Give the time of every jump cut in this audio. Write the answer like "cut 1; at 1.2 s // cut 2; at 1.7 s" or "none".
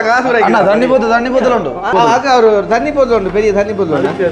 cut 1; at 1.9 s

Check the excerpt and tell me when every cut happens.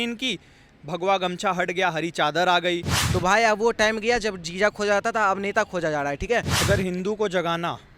cut 1; at 3.0 s // cut 2; at 6.5 s

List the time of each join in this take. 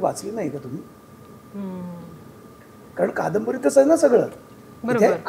none

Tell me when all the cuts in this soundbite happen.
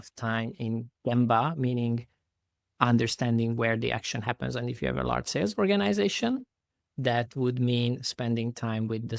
none

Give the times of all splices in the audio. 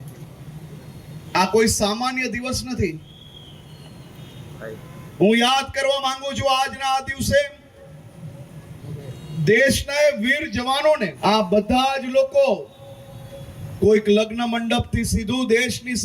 cut 1; at 11.1 s

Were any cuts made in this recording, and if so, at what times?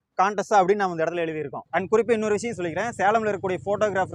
cut 1; at 1.5 s

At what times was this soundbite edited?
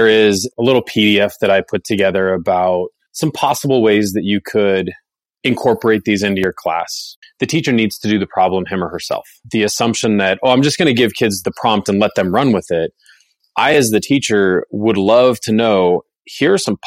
cut 1; at 7.1 s // cut 2; at 9.4 s

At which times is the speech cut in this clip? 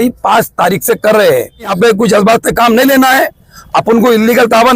cut 1; at 1.7 s

